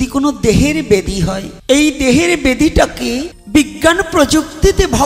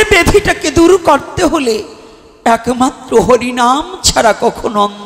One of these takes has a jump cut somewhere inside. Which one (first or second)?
first